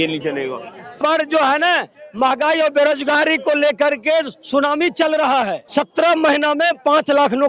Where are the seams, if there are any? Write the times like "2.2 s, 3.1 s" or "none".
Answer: 1.0 s, 5.6 s